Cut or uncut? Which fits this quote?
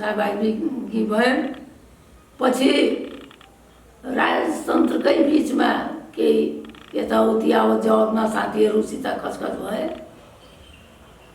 uncut